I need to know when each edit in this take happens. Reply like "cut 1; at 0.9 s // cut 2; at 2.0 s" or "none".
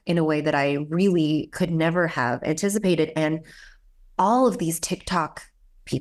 none